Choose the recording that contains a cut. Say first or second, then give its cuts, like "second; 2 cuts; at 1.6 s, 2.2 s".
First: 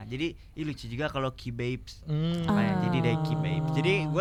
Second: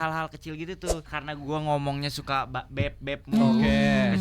second; 1 cut; at 1.1 s